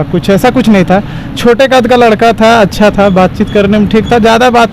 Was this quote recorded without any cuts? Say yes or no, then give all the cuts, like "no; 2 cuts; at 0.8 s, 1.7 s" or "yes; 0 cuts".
yes; 0 cuts